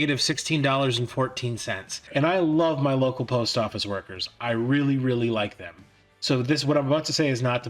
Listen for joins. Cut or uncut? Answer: cut